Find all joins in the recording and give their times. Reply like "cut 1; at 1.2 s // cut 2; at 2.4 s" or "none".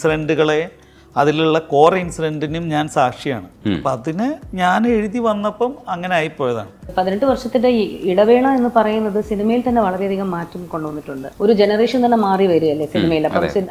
cut 1; at 6.9 s // cut 2; at 11.2 s